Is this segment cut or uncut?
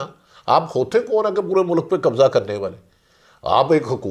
uncut